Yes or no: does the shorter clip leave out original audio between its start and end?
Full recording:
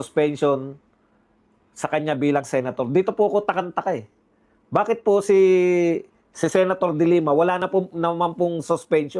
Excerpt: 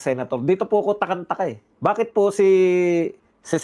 yes